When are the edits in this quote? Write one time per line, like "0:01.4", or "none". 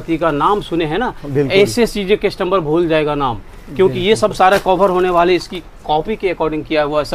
none

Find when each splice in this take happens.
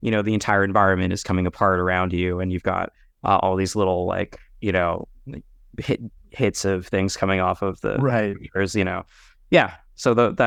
none

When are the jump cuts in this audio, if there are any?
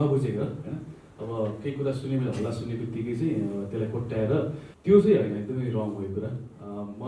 0:04.7

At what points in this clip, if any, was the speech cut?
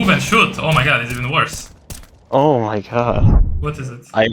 0:03.3

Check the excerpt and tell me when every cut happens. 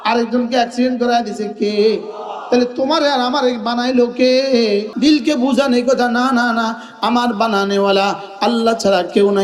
0:04.9

